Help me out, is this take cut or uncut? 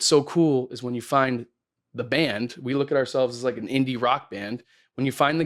uncut